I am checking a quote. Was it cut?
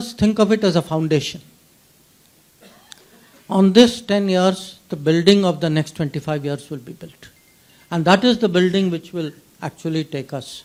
no; 0 cuts

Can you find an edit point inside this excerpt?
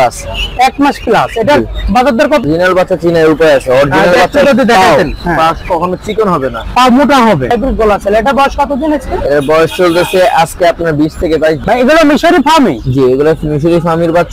yes; 3 cuts; at 2.4 s, 7.5 s, 11.6 s

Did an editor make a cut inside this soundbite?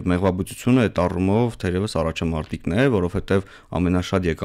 no; 0 cuts

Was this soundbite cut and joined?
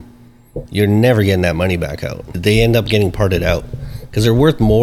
yes; 1 cut; at 2.2 s

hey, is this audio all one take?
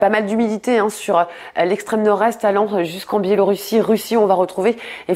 no; 1 cut; at 0.9 s

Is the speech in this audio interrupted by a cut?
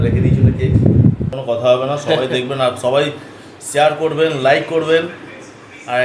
yes; 1 cut; at 1.3 s

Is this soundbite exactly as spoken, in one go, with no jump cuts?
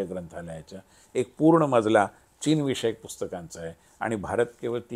yes; 0 cuts

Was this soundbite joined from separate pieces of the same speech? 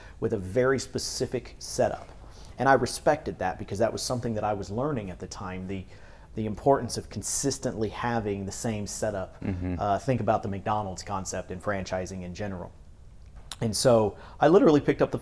no; 0 cuts

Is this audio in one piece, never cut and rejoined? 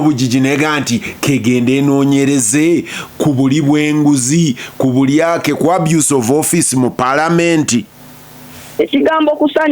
yes; 0 cuts

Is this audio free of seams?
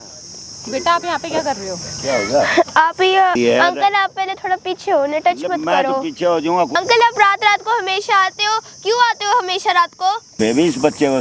no; 3 cuts; at 3.3 s, 6.7 s, 10.3 s

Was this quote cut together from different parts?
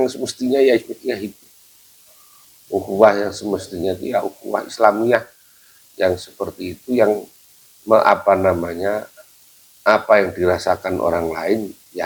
no; 0 cuts

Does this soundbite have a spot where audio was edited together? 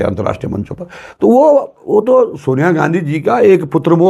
no; 0 cuts

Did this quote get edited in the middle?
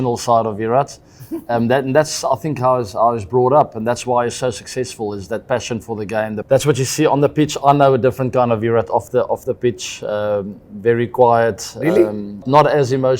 no; 0 cuts

